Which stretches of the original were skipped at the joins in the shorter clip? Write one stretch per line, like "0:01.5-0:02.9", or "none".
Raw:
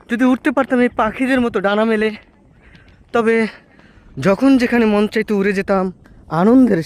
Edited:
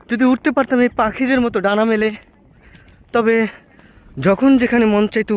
none